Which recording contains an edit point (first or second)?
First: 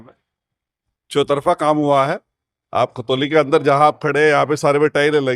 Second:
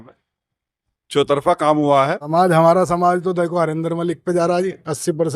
second